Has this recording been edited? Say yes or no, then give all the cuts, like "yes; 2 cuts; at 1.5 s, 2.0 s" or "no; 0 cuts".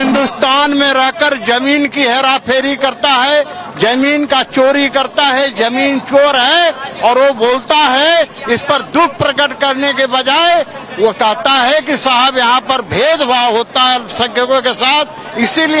no; 0 cuts